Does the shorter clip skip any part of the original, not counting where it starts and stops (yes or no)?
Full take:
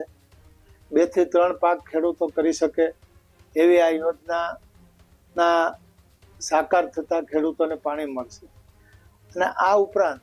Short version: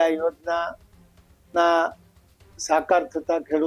no